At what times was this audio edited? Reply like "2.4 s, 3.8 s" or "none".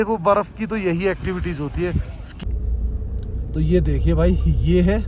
2.4 s